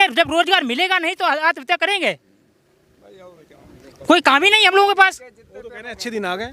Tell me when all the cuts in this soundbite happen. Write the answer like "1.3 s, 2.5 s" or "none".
none